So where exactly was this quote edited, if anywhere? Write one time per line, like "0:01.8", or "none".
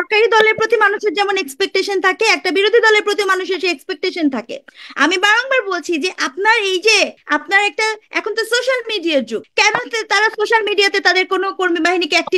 0:07.2
0:09.4